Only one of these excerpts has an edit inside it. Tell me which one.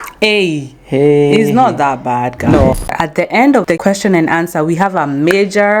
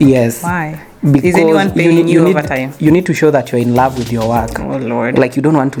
first; 1 cut; at 2.8 s

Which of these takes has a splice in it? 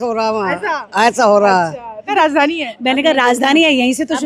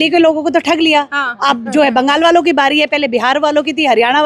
first; 1 cut; at 2.1 s

